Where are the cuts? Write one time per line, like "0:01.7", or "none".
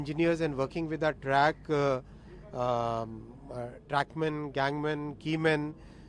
none